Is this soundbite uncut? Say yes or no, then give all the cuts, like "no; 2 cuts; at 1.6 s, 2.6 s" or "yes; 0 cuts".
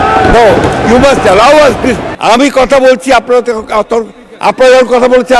no; 1 cut; at 2.1 s